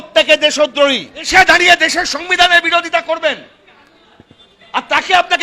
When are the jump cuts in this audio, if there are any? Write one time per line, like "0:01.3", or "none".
0:01.3

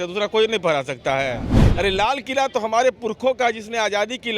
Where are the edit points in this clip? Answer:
0:01.6

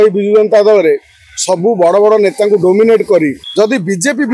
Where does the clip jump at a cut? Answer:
0:03.4

